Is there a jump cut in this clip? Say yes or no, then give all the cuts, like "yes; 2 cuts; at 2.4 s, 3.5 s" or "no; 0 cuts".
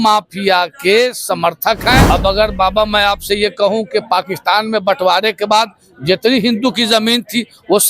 yes; 1 cut; at 2.1 s